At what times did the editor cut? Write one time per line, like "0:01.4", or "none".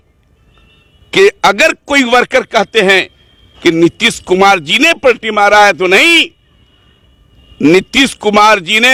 none